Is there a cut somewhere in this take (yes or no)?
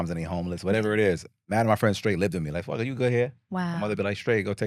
no